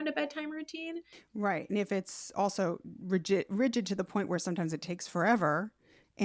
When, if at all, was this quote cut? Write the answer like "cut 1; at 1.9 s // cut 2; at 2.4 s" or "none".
cut 1; at 1.2 s